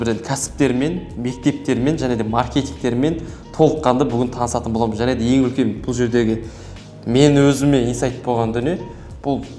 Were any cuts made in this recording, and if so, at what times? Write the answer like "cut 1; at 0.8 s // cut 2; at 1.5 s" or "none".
none